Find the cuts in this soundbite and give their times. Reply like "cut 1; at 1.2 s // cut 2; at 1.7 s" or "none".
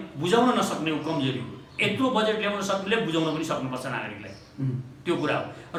none